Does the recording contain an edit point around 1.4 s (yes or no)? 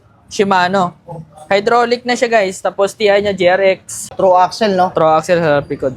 no